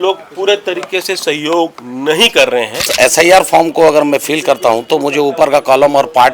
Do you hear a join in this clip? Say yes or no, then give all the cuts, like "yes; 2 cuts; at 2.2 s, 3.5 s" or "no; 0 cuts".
yes; 1 cut; at 2.9 s